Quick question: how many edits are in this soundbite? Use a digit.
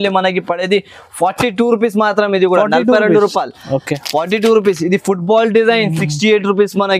0